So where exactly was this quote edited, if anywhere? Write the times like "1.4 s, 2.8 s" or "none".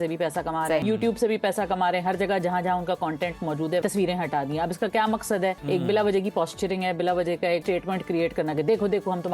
0.8 s, 3.8 s, 5.6 s, 7.6 s

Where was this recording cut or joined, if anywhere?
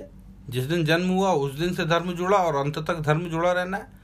none

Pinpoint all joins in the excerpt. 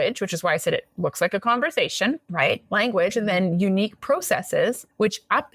none

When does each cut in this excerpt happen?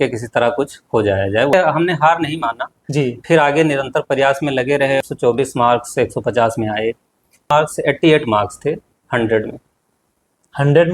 1.5 s, 5.0 s, 7.5 s

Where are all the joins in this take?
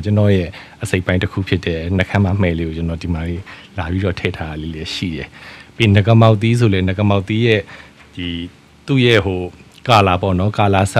none

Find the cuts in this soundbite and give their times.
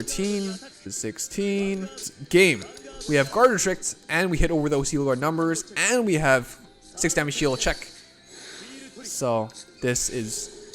0.9 s, 2.1 s

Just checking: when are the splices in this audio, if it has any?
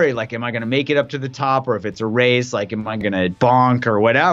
3.3 s

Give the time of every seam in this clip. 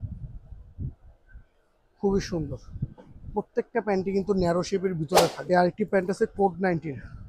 5.4 s

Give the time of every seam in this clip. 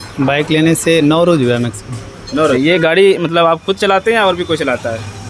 2.6 s

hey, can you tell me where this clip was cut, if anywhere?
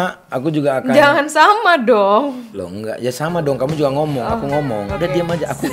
none

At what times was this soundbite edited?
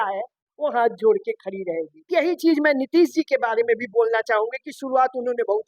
2.1 s

